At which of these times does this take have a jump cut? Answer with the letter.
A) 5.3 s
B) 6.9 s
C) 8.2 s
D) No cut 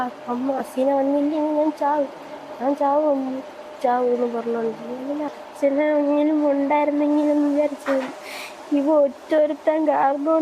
A